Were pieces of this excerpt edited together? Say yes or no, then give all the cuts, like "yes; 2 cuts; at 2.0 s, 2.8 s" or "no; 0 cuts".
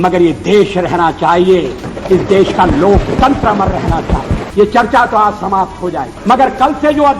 yes; 2 cuts; at 4.4 s, 6.1 s